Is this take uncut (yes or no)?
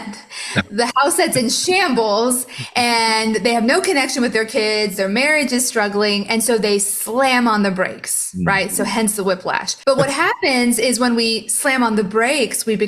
no